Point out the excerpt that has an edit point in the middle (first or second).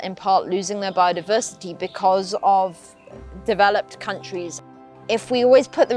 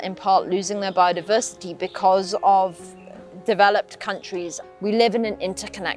first